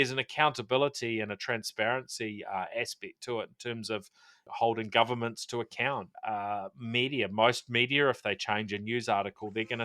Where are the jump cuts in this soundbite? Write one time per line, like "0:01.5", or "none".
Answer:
0:04.4
0:06.6

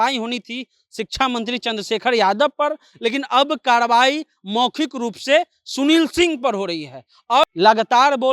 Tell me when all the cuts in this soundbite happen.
0:07.4

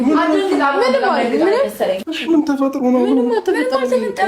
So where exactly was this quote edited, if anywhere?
0:02.1

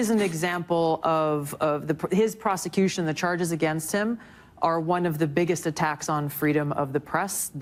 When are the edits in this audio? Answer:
none

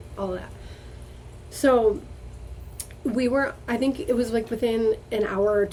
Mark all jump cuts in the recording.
none

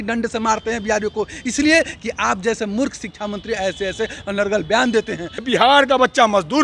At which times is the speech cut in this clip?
0:05.4

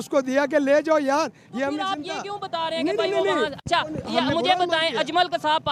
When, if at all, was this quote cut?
none

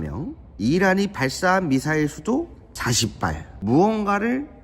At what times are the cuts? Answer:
0:03.5

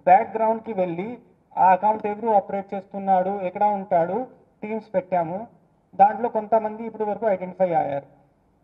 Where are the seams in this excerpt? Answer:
none

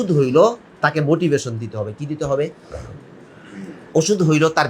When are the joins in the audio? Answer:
none

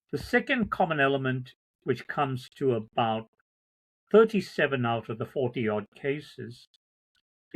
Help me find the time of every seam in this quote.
none

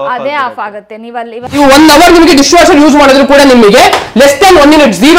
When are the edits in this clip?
0:01.6

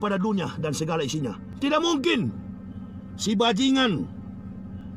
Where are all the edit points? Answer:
0:01.5

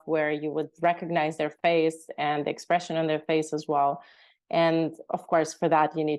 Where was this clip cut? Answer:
none

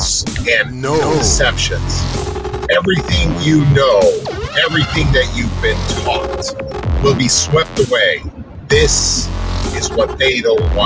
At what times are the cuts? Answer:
none

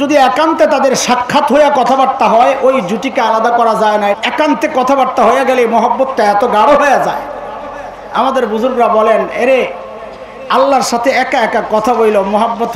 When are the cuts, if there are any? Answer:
0:04.2

